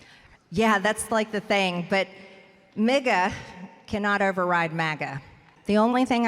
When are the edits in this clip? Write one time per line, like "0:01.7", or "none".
0:05.4